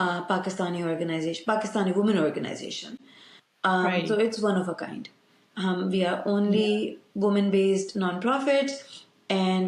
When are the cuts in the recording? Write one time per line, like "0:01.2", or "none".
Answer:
none

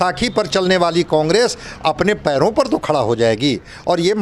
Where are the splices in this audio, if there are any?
none

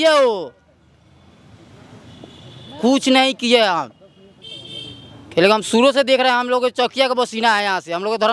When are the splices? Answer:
none

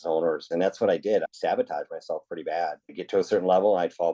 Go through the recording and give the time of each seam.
0:01.3
0:02.9

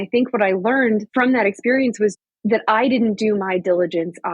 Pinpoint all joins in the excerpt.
0:01.1
0:02.2

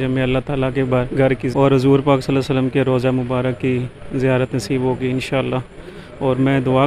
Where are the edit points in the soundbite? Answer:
none

